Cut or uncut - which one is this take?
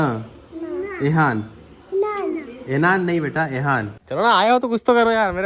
cut